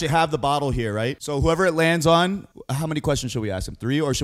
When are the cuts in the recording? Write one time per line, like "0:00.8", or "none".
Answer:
0:01.2
0:02.6